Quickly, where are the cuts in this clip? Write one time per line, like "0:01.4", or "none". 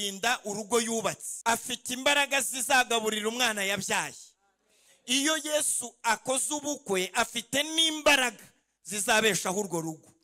0:01.3